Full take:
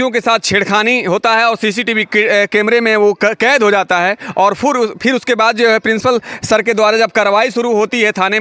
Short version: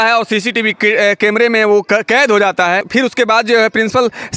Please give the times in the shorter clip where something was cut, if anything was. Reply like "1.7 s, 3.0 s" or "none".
2.9 s